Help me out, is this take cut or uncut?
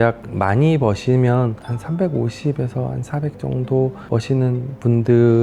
uncut